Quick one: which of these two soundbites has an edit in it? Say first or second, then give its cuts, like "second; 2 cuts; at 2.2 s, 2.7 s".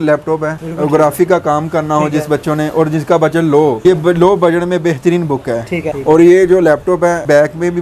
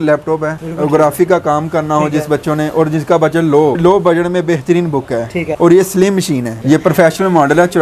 second; 3 cuts; at 3.8 s, 5.5 s, 6.5 s